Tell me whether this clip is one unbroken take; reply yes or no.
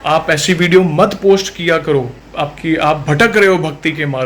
no